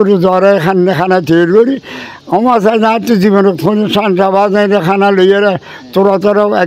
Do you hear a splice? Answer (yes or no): no